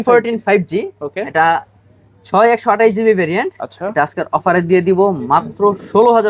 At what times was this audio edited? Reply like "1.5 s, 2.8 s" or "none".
none

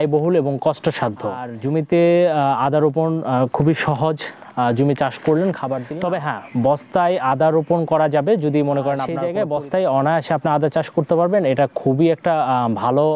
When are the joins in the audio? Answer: 1.5 s, 5.8 s, 9.2 s

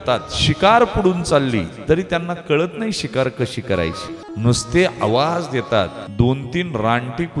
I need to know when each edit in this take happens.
4.2 s, 6.0 s

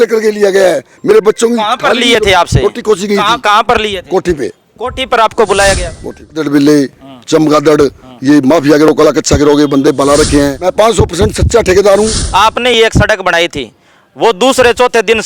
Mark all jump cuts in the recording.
6.4 s, 10.6 s, 12.2 s

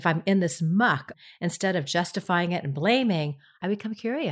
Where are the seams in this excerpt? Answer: 1.2 s, 3.6 s

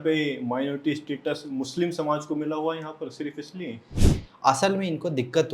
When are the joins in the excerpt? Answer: 3.9 s

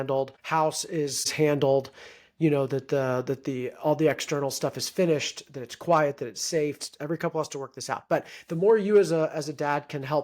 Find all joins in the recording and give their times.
6.9 s

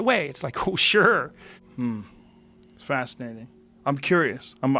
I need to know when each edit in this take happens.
none

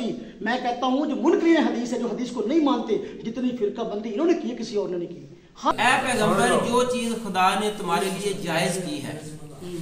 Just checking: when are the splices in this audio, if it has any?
5.7 s

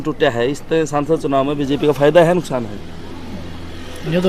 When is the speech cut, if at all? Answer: none

